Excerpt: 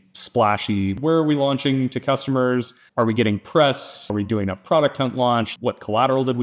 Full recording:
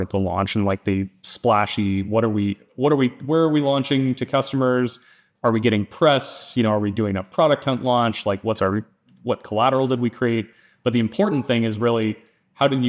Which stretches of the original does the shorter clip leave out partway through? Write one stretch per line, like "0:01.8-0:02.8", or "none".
0:02.0-0:03.2
0:05.0-0:05.2
0:06.6-0:06.8
0:08.2-0:09.1